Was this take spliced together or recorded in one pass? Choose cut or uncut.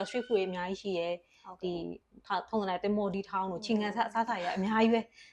uncut